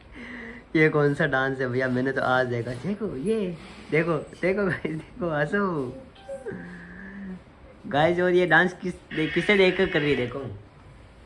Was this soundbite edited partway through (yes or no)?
no